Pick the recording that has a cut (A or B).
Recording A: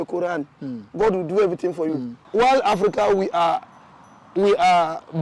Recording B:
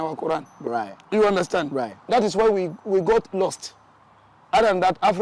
A